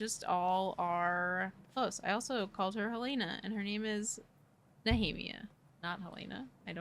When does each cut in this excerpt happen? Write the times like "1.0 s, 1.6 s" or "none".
1.6 s, 5.7 s

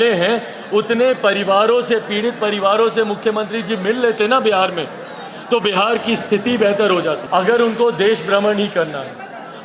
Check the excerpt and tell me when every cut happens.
7.2 s

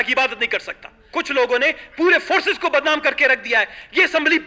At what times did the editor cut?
1.1 s

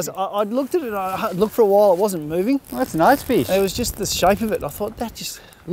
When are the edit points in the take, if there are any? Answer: none

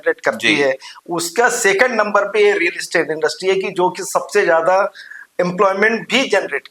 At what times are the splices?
none

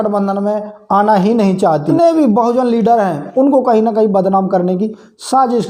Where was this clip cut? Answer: 1.9 s

